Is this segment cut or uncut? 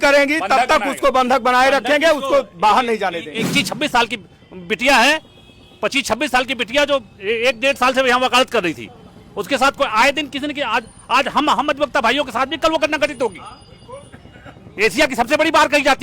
cut